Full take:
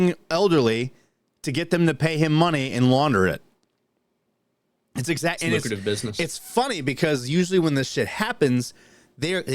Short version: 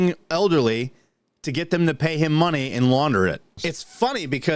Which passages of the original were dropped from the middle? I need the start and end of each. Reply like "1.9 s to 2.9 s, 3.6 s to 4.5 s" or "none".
3.5 s to 6.1 s